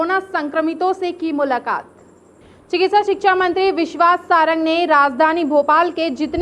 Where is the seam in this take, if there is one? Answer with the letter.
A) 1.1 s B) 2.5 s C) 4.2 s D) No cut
D